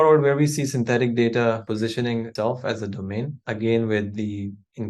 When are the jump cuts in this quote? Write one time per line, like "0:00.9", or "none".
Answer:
0:01.7
0:03.4